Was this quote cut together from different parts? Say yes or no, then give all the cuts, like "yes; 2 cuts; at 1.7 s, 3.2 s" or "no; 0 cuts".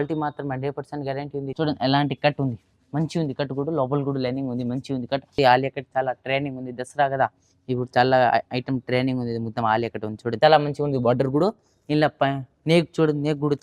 yes; 3 cuts; at 1.5 s, 5.3 s, 10.4 s